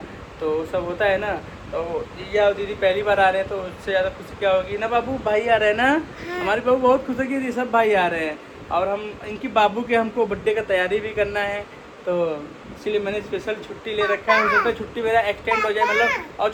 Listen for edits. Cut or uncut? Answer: uncut